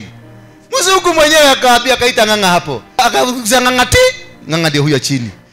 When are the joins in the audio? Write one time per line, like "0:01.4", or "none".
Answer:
0:03.0